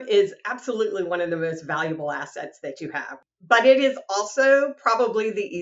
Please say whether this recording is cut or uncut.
cut